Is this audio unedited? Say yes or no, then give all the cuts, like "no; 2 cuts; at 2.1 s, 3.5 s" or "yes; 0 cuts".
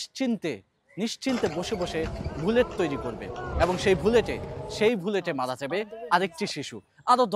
yes; 0 cuts